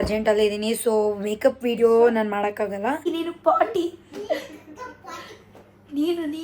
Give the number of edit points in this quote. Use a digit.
1